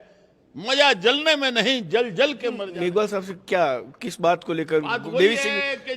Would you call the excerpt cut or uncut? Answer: cut